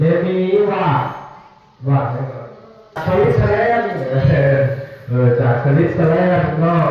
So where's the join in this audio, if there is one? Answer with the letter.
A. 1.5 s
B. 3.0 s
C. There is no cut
B